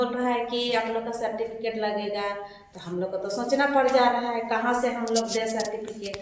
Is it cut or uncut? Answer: uncut